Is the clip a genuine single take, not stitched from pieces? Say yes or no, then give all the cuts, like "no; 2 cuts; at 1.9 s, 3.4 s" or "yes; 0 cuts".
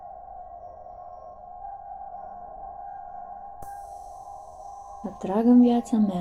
yes; 0 cuts